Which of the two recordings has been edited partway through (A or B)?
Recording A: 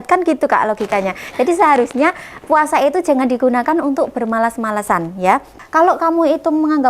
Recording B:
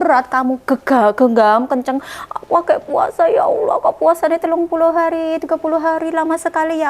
A